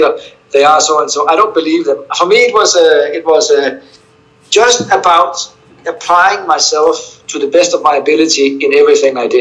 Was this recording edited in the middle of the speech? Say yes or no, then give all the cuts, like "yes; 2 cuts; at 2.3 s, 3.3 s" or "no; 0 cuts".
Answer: no; 0 cuts